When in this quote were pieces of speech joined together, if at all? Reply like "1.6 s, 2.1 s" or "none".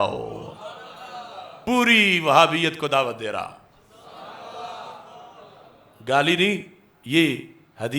1.6 s